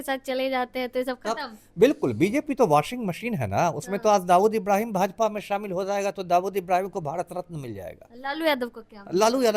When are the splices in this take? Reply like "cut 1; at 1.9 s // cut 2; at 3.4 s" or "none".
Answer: none